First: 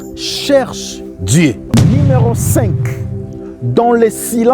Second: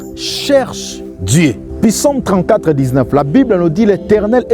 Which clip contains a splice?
first; 1 cut; at 1.6 s

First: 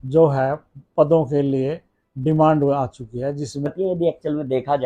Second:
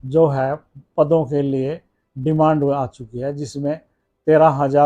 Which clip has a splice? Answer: first; 1 cut; at 3.7 s

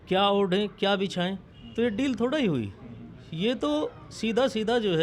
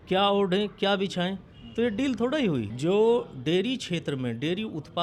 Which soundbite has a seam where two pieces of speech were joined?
second; 1 cut; at 2.7 s

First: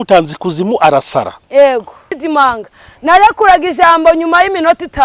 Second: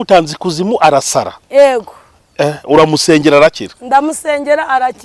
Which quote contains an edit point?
first; 1 cut; at 2.1 s

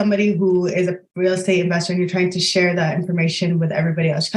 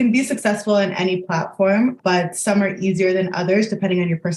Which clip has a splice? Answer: first; 1 cut; at 1.0 s

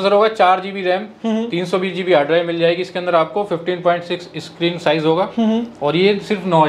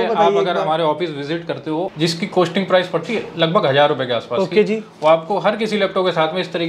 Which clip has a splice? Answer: second; 1 cut; at 1.9 s

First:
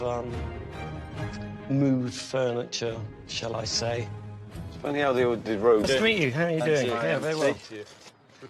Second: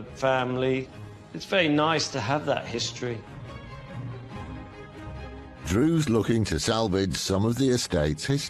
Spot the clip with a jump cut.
first; 1 cut; at 6.4 s

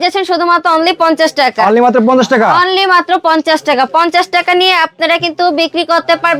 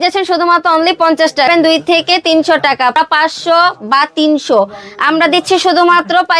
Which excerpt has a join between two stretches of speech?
second; 2 cuts; at 1.5 s, 2.9 s

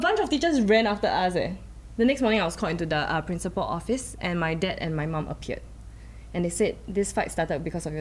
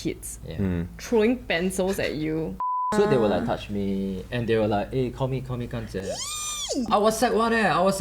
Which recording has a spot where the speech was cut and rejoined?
second; 1 cut; at 2.7 s

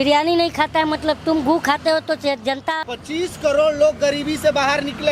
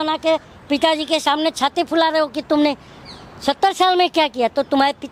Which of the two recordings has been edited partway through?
first; 1 cut; at 2.8 s

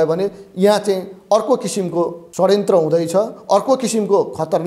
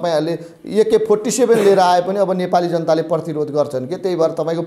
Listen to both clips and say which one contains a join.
first; 1 cut; at 2.2 s

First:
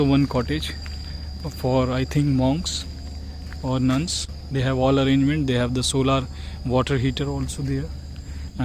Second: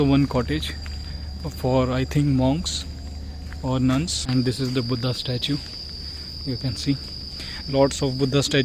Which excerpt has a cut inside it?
second; 1 cut; at 4.2 s

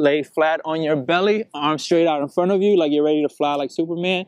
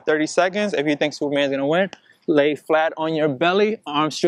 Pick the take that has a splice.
second; 1 cut; at 1.2 s

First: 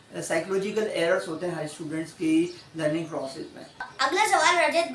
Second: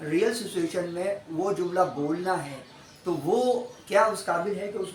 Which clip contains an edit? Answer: first; 1 cut; at 3.9 s

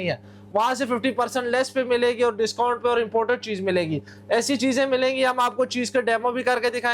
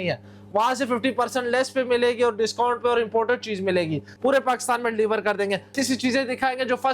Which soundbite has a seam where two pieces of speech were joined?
second; 2 cuts; at 4.1 s, 5.8 s

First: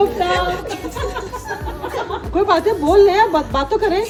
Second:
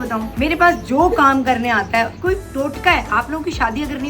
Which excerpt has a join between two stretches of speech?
second; 1 cut; at 2.1 s

